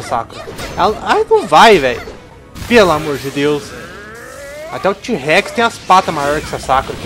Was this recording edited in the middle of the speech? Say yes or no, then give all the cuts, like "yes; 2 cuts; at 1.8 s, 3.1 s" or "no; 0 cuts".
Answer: no; 0 cuts